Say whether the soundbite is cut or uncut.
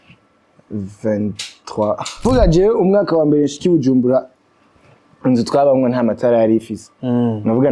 cut